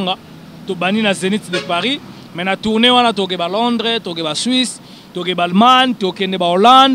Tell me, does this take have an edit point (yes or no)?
no